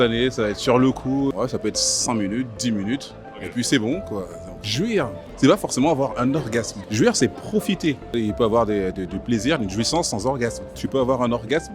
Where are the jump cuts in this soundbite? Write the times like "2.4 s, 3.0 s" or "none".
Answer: 1.3 s, 4.7 s, 6.8 s, 8.1 s, 10.7 s